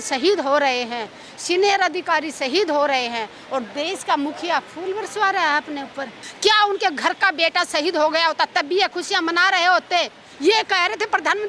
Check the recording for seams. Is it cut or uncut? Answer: cut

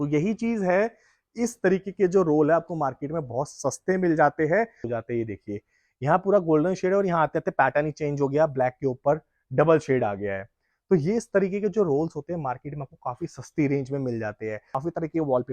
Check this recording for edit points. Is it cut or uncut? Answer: cut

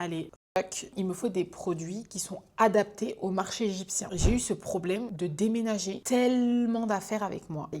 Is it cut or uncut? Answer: cut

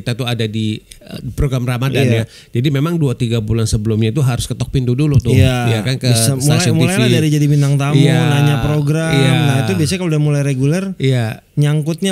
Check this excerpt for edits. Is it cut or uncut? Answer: uncut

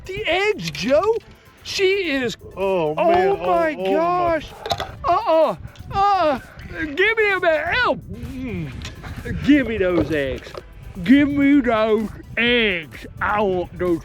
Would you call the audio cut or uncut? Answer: uncut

